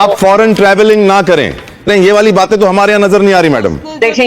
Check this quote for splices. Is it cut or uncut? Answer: cut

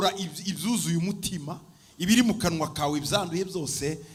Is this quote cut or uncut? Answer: uncut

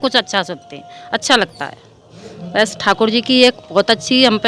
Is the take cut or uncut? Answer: uncut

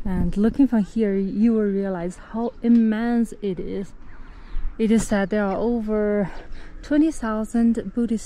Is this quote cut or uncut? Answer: uncut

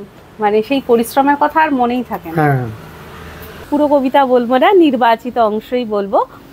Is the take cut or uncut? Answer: cut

